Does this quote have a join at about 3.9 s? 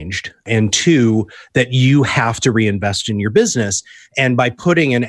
no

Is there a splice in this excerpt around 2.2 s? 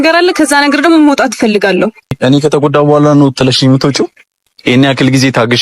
yes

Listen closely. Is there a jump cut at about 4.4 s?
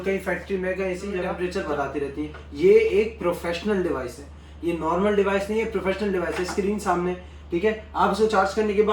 no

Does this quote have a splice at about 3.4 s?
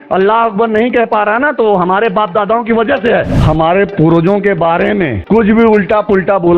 yes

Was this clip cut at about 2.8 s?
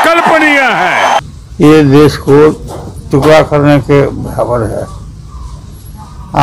no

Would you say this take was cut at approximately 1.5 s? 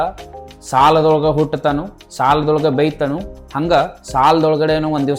no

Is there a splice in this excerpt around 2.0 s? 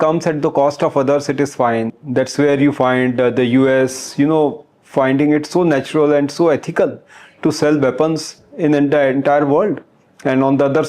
yes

